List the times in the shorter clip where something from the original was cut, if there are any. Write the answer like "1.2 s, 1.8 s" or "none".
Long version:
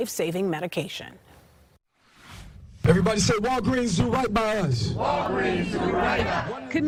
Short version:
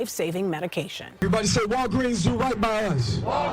1.2 s